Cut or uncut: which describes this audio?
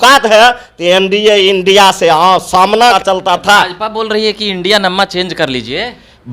cut